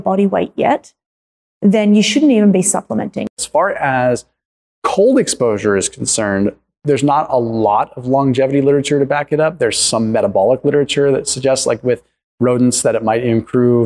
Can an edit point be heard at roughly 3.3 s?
yes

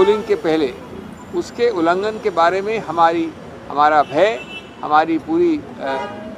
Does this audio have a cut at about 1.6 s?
no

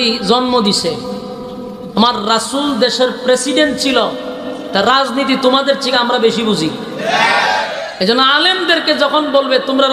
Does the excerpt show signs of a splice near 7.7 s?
yes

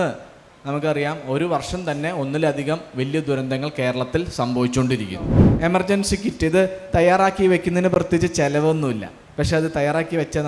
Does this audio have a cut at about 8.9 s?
no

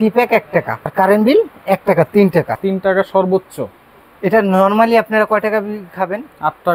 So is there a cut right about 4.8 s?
no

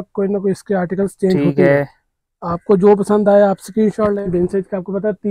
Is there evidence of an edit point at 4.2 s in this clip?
yes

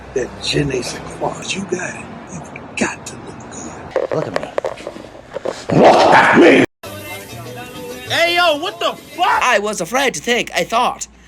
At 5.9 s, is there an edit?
no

